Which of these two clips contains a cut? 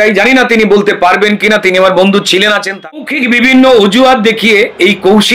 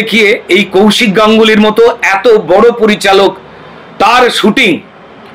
first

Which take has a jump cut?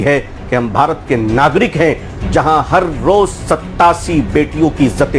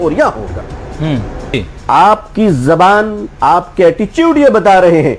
second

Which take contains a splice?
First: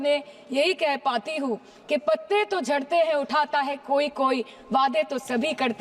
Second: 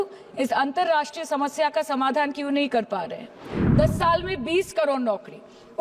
second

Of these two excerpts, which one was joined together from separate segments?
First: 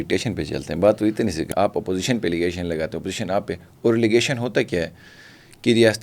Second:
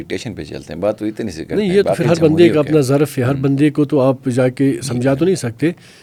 first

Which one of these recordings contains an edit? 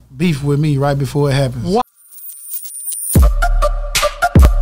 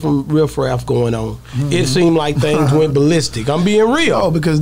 first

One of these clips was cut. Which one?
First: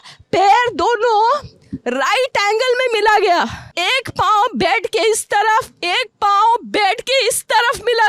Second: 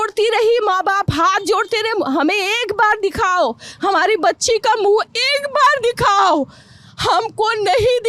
first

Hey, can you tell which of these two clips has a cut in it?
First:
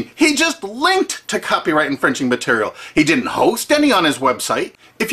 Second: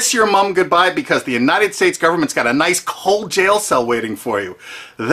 first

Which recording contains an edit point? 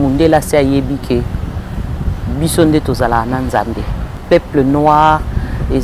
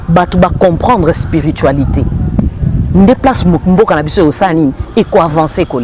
first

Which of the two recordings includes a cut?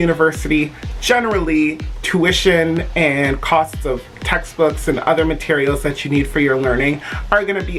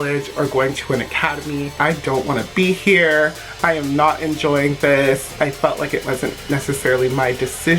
second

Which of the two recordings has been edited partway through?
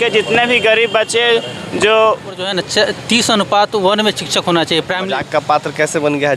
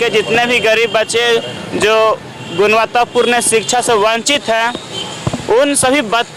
first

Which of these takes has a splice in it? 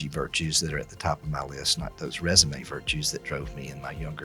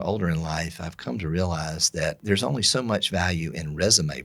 second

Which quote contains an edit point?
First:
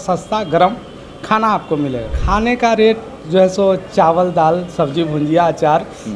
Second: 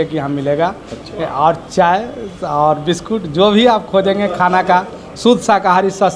first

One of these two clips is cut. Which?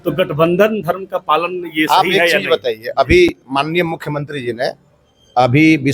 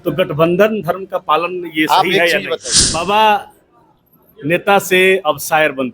second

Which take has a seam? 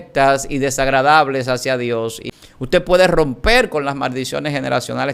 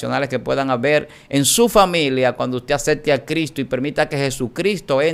first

